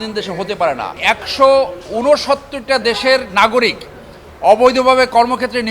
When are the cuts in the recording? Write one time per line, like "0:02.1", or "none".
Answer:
0:00.9